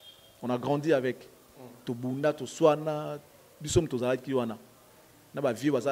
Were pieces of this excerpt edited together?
no; 0 cuts

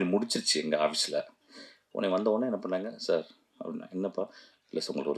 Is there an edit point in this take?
no; 0 cuts

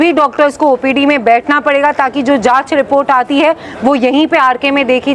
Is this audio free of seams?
yes; 0 cuts

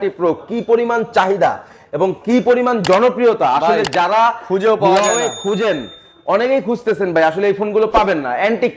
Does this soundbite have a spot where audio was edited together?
no; 0 cuts

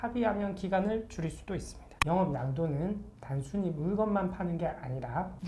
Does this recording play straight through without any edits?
no; 1 cut; at 1.9 s

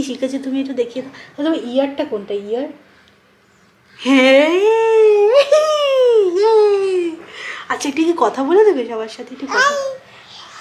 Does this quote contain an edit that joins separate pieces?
no; 0 cuts

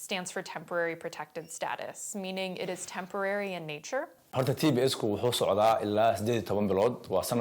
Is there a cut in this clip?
yes; 1 cut; at 4.3 s

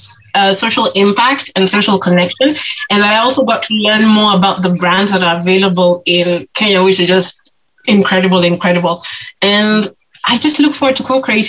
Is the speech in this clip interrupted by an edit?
no; 0 cuts

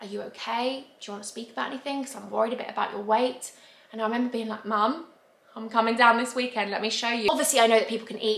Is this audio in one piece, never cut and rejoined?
yes; 0 cuts

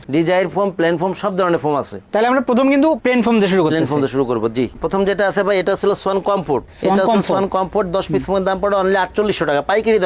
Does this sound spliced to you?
no; 0 cuts

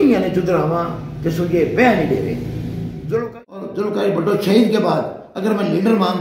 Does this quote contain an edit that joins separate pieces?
yes; 1 cut; at 3.3 s

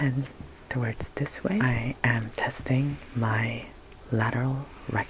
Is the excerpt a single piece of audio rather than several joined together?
no; 2 cuts; at 1.6 s, 3.0 s

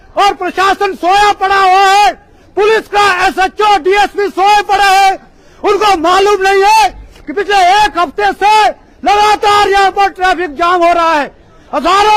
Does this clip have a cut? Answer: no; 0 cuts

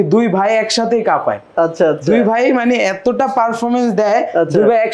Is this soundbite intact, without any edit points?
yes; 0 cuts

